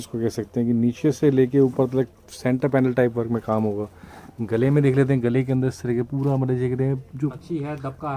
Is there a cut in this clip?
no; 0 cuts

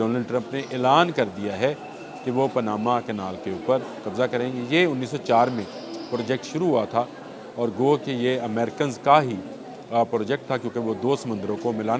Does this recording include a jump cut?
no; 0 cuts

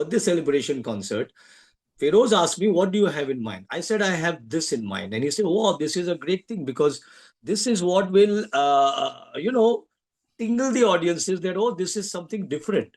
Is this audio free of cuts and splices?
yes; 0 cuts

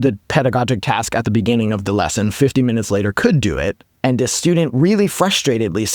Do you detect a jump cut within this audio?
yes; 1 cut; at 3.9 s

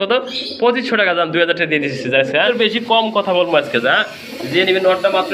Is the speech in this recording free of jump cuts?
no; 1 cut; at 2.5 s

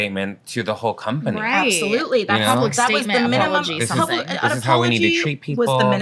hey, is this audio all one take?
yes; 0 cuts

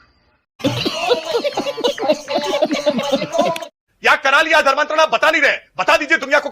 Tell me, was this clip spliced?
no; 0 cuts

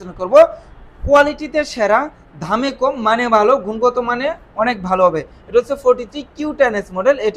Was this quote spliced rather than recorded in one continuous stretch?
no; 0 cuts

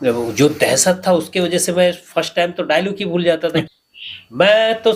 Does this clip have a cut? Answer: yes; 1 cut; at 3.7 s

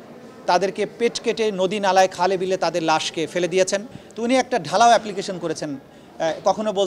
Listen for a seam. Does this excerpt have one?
yes; 1 cut; at 4.0 s

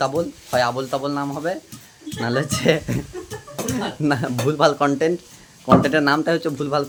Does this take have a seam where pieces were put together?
no; 0 cuts

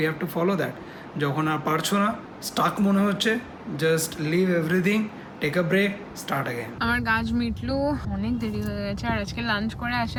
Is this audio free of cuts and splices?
yes; 0 cuts

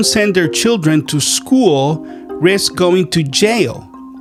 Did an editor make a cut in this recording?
no; 0 cuts

